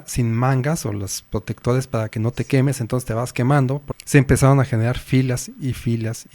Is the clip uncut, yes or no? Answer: no